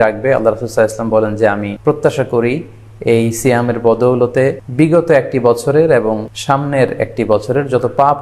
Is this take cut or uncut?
cut